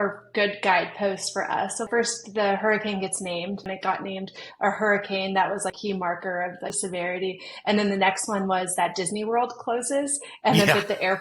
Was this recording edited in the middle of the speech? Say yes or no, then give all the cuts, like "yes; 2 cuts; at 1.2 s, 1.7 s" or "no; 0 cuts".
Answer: yes; 4 cuts; at 1.9 s, 3.7 s, 5.8 s, 6.8 s